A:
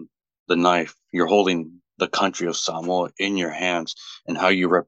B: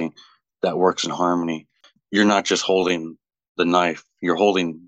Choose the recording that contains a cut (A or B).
B